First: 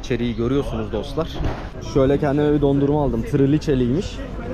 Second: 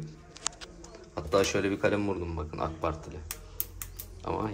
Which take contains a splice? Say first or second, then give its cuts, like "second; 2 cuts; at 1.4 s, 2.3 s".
first; 1 cut; at 1.8 s